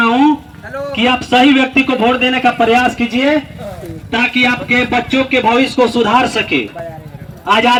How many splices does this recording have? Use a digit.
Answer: 0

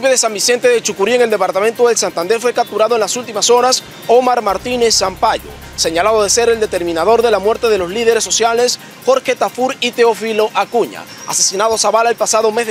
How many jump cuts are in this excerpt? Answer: 0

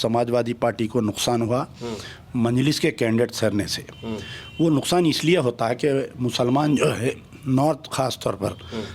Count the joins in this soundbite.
0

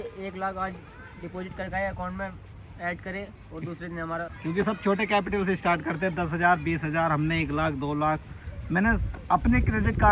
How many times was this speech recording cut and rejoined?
1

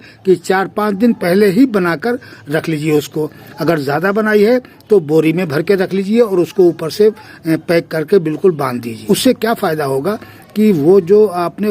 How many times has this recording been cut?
1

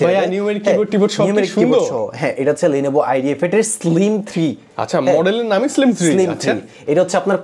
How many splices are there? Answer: 0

